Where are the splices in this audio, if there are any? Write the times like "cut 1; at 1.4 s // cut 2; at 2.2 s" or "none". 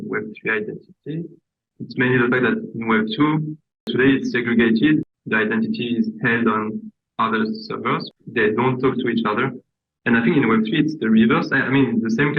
cut 1; at 3.9 s // cut 2; at 5.1 s // cut 3; at 8.1 s